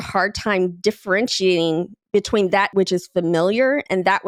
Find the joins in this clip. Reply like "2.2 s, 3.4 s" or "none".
none